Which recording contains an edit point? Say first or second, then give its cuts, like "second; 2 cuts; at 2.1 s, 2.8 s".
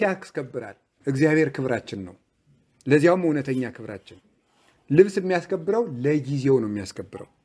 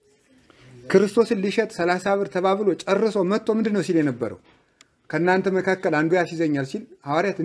first; 1 cut; at 1.0 s